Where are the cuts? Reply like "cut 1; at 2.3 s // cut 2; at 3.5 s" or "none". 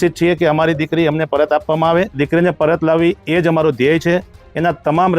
cut 1; at 2.2 s